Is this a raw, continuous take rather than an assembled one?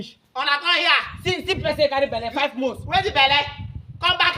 yes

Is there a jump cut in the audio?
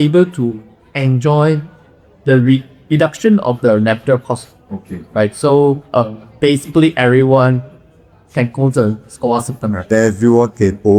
no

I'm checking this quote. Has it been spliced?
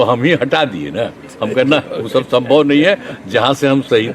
no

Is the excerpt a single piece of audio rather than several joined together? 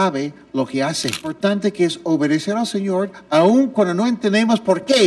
no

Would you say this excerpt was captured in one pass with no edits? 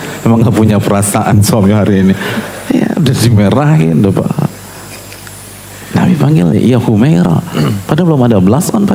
yes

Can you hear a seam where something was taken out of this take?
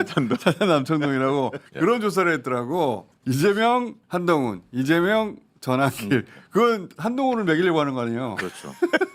yes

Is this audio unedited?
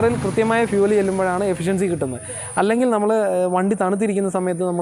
yes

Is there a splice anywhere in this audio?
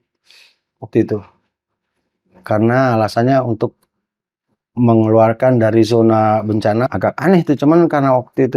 yes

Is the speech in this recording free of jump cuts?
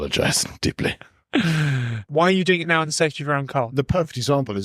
no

